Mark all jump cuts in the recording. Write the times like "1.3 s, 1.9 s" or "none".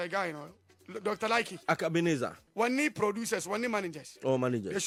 none